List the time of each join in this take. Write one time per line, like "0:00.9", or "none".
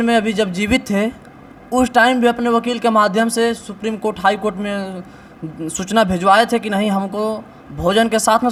none